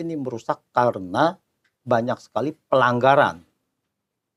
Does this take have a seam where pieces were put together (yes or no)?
no